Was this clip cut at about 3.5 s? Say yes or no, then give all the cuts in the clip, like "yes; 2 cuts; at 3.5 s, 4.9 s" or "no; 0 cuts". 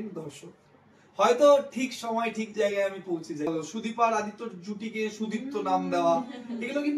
yes; 1 cut; at 3.5 s